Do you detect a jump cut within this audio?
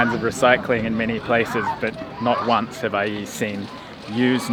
no; 0 cuts

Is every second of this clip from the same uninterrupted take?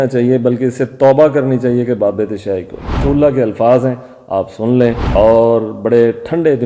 no; 1 cut; at 2.9 s

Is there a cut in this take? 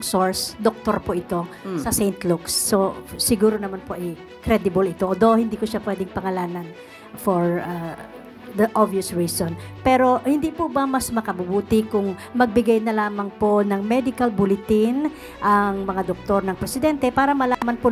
no; 0 cuts

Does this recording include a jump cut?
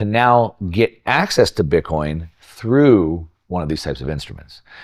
no; 0 cuts

